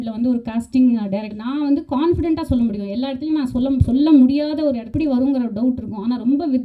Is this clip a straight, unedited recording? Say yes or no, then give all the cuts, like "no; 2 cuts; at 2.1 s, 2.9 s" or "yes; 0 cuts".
no; 2 cuts; at 1.4 s, 4.9 s